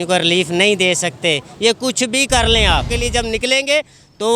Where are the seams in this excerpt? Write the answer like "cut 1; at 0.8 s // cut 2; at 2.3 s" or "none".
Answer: cut 1; at 2.9 s